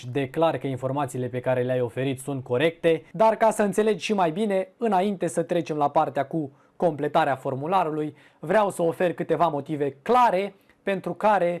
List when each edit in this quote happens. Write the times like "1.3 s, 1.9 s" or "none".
3.1 s